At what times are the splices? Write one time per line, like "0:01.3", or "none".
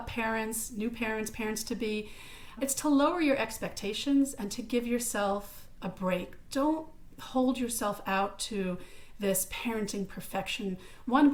none